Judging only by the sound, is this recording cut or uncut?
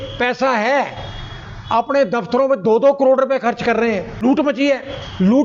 cut